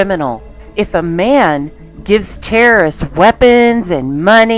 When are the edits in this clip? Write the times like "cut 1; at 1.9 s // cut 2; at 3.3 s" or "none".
cut 1; at 3.1 s